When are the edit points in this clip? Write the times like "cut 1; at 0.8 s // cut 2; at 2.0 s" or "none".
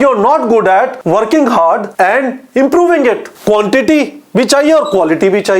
cut 1; at 1.0 s // cut 2; at 1.9 s // cut 3; at 3.3 s